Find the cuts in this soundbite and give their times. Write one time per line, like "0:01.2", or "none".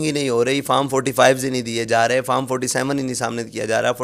none